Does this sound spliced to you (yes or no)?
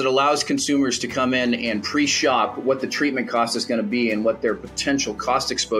no